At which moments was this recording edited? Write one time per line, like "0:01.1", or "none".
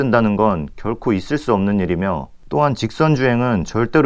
0:02.3